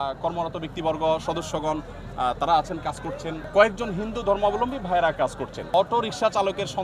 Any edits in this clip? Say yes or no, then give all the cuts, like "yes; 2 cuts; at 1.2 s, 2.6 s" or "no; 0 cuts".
yes; 2 cuts; at 3.5 s, 5.6 s